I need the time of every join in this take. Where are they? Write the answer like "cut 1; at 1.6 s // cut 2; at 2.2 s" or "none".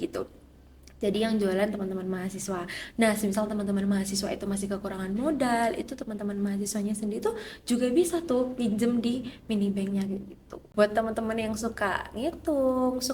cut 1; at 10.6 s